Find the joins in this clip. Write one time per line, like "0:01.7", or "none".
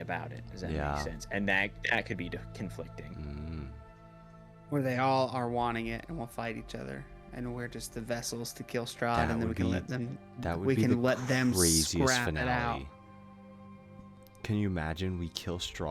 none